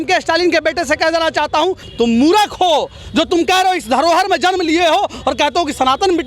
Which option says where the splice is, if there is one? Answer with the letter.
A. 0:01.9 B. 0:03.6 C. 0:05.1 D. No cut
A